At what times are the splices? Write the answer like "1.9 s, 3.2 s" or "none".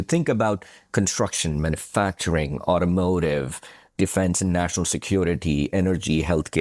3.9 s